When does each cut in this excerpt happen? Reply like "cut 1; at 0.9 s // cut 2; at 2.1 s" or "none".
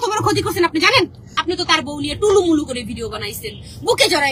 cut 1; at 1.3 s